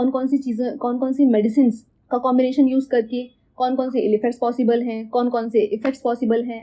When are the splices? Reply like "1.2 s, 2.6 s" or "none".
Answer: none